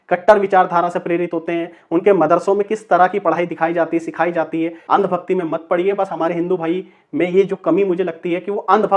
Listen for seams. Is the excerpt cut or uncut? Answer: cut